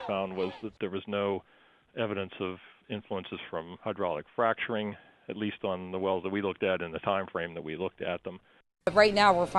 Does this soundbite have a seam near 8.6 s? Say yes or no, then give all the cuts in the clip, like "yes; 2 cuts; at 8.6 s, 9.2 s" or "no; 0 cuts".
yes; 1 cut; at 8.6 s